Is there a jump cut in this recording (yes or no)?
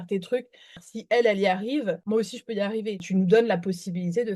yes